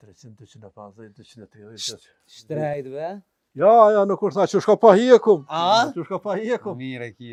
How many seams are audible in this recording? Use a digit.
0